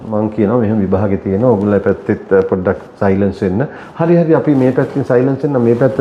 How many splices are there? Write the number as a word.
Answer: zero